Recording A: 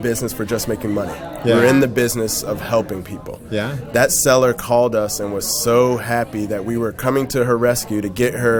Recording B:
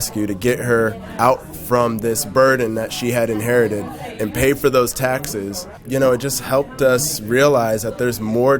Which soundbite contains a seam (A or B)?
B